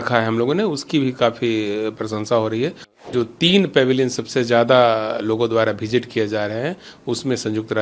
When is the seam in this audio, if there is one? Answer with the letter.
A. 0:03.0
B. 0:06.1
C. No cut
A